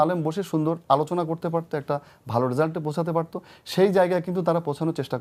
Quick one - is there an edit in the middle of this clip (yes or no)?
no